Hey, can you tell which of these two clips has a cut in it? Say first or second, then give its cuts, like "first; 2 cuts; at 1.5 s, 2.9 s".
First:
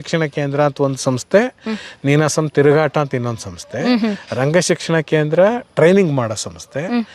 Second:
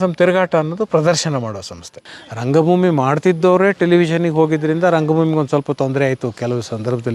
second; 1 cut; at 2.0 s